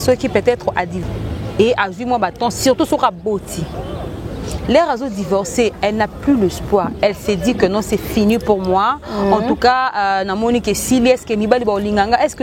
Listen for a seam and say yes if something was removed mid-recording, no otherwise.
yes